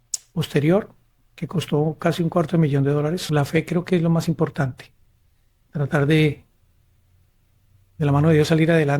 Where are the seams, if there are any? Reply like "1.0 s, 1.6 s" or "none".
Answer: 3.2 s